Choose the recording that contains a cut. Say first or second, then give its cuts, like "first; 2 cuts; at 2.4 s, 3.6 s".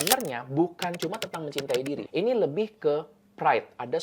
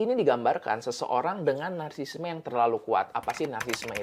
first; 1 cut; at 2.0 s